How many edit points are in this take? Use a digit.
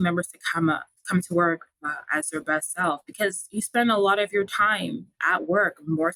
0